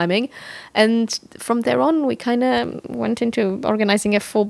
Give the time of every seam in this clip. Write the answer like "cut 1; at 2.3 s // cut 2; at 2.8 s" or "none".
none